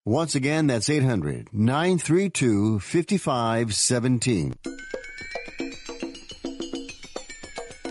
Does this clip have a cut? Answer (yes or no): yes